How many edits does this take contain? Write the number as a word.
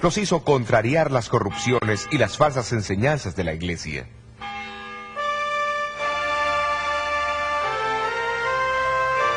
one